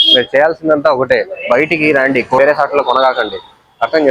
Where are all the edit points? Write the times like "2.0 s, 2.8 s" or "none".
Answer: 2.4 s